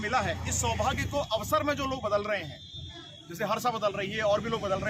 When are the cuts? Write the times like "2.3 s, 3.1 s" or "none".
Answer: none

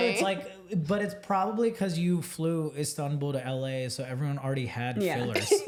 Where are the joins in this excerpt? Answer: none

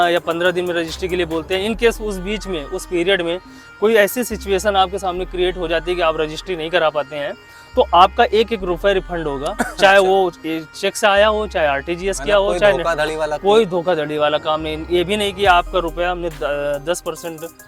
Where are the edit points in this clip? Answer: none

